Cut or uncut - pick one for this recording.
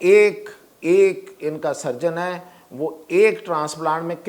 uncut